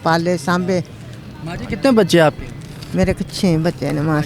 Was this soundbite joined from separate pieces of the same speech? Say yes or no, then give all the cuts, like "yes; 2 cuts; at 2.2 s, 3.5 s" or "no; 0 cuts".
no; 0 cuts